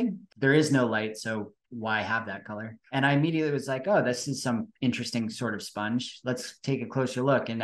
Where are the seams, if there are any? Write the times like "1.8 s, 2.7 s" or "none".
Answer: 2.8 s

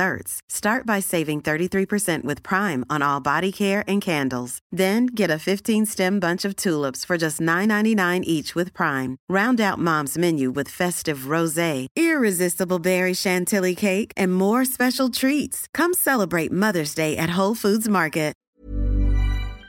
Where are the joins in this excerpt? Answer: 18.5 s

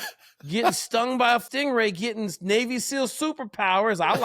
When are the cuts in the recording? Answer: 1.4 s

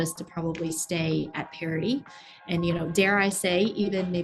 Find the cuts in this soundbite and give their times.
none

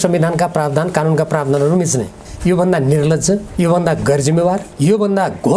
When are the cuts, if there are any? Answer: 2.2 s, 3.5 s, 4.7 s

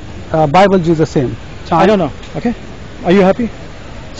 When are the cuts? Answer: 1.7 s

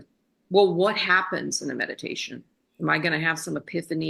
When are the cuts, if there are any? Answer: none

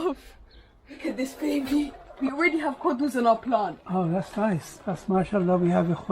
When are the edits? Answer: 1.0 s, 2.1 s

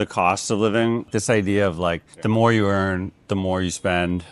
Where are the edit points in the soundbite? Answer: 1.1 s

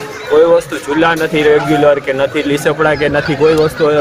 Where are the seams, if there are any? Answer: none

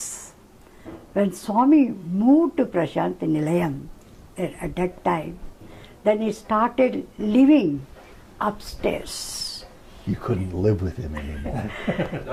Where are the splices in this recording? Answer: none

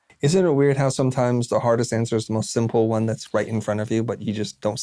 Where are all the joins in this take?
none

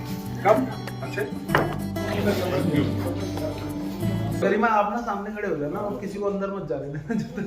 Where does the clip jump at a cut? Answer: 4.4 s

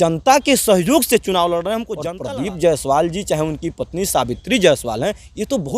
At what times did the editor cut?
2.0 s

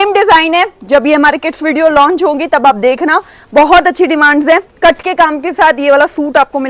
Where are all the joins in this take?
none

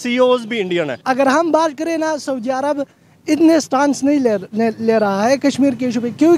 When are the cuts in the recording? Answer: 1.0 s

